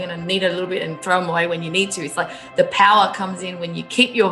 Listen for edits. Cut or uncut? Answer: uncut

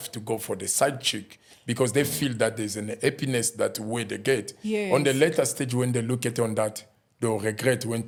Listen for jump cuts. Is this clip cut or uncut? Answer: uncut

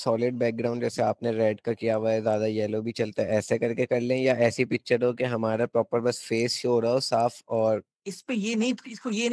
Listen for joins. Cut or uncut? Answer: cut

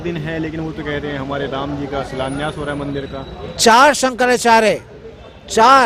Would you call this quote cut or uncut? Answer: uncut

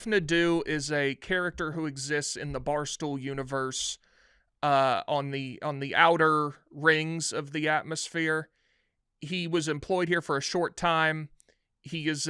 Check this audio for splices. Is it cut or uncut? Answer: uncut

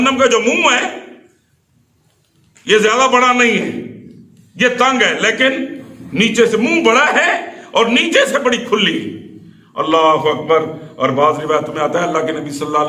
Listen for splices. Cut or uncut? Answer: uncut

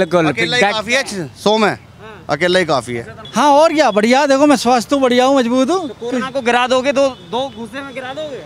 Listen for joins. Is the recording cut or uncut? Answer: cut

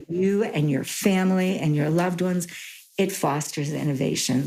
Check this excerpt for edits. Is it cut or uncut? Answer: uncut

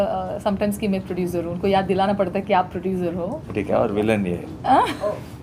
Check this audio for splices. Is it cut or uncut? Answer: cut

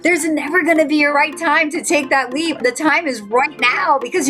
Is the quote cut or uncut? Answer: cut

